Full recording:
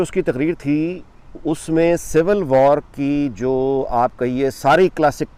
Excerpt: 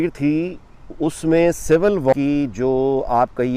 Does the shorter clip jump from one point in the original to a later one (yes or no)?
yes